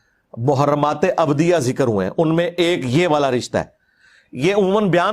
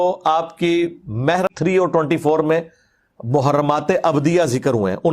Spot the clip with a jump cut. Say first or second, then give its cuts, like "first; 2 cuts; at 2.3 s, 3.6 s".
second; 1 cut; at 1.5 s